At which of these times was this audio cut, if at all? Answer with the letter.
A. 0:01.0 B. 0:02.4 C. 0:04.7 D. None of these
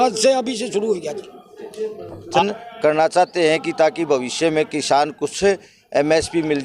B